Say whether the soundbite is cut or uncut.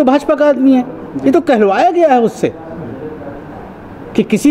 uncut